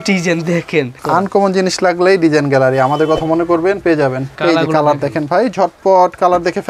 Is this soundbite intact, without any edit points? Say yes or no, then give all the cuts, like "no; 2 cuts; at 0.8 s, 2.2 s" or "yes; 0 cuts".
no; 2 cuts; at 1.0 s, 4.3 s